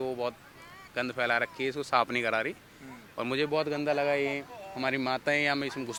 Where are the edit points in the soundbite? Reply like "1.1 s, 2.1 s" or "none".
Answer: none